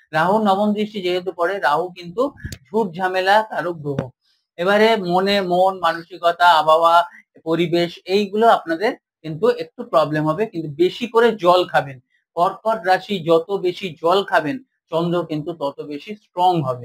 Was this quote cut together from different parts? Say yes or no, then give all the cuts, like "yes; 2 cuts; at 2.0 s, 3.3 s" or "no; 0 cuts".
no; 0 cuts